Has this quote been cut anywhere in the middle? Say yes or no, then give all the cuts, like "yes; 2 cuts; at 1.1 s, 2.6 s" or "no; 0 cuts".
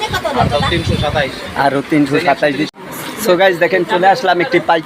yes; 1 cut; at 2.7 s